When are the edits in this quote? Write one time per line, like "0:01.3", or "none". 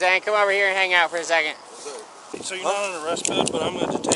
0:02.4